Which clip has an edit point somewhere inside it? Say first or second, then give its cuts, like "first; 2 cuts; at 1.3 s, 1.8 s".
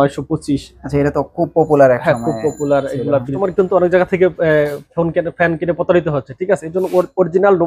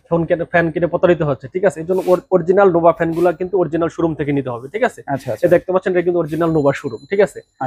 first; 1 cut; at 3.3 s